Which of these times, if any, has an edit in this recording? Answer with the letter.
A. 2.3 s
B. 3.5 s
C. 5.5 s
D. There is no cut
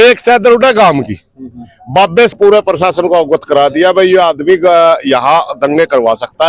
A